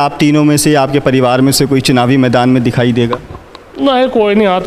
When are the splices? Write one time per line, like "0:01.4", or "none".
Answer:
none